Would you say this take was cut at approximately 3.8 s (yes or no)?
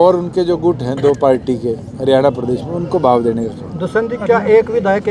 no